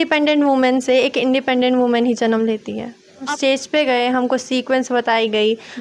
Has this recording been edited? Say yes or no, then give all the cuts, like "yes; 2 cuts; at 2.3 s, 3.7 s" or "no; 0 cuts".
yes; 1 cut; at 3.3 s